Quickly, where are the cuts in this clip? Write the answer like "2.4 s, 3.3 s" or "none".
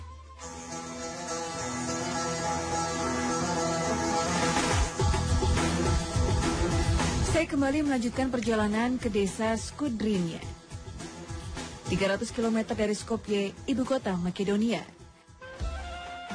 1.8 s